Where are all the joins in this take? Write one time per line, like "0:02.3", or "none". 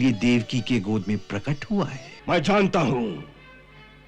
0:02.1